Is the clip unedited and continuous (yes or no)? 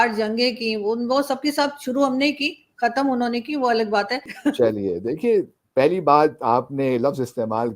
no